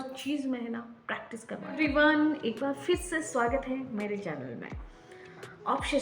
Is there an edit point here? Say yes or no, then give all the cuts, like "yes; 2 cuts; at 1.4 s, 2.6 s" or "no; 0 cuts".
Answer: yes; 1 cut; at 1.7 s